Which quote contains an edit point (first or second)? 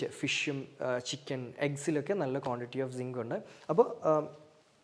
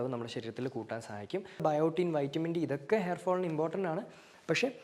second